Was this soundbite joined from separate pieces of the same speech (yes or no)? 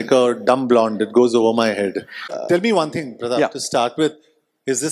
yes